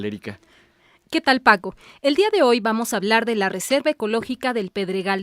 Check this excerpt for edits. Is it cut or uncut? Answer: cut